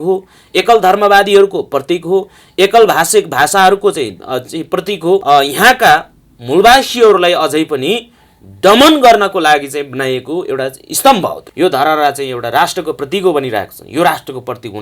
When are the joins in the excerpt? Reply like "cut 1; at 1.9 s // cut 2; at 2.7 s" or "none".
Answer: cut 1; at 5.2 s // cut 2; at 11.4 s

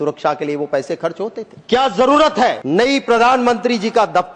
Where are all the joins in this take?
cut 1; at 1.5 s // cut 2; at 2.6 s

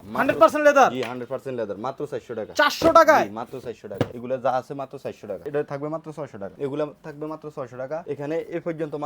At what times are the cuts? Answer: cut 1; at 4.2 s // cut 2; at 5.3 s // cut 3; at 6.5 s // cut 4; at 8.0 s

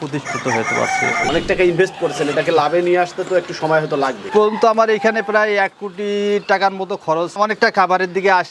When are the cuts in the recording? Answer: cut 1; at 1.2 s

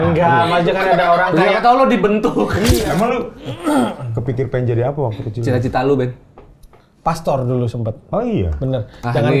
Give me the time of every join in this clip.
cut 1; at 2.8 s

